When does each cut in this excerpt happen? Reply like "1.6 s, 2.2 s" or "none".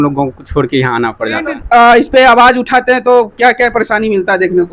1.5 s